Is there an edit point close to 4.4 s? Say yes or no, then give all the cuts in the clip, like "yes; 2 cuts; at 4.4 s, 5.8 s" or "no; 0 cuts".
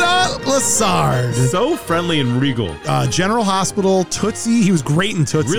no; 1 cut; at 2.8 s